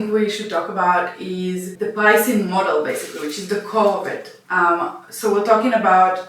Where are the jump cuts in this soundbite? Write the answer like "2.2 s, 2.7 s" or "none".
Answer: 1.7 s